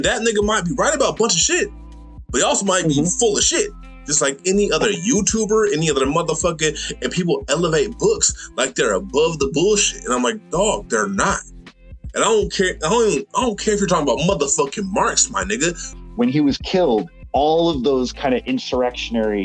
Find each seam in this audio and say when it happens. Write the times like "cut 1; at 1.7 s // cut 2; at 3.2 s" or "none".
cut 1; at 15.9 s

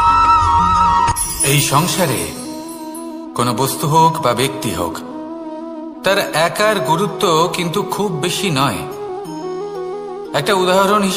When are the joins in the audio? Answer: cut 1; at 1.1 s

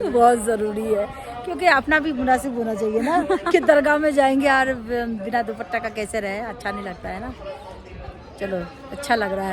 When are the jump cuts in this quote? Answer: none

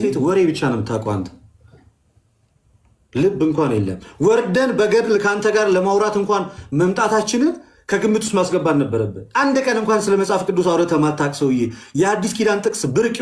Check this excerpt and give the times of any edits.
none

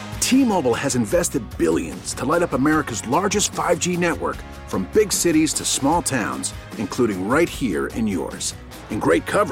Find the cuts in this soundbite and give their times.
none

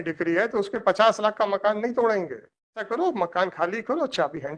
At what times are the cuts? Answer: cut 1; at 2.9 s

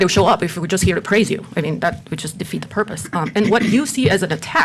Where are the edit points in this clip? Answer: none

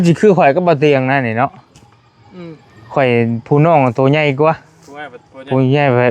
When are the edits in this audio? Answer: none

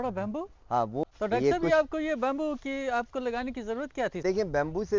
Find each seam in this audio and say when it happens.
cut 1; at 1.0 s // cut 2; at 4.2 s

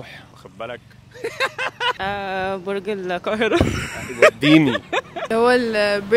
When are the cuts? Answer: cut 1; at 2.0 s // cut 2; at 5.2 s

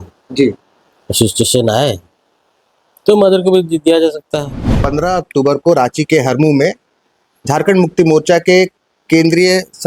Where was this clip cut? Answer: cut 1; at 4.7 s

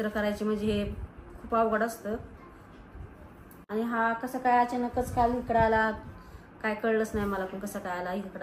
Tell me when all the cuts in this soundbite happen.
cut 1; at 3.7 s

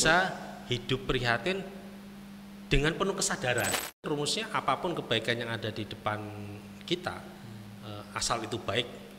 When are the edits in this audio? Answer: cut 1; at 4.0 s

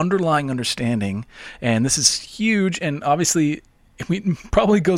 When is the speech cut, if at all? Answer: none

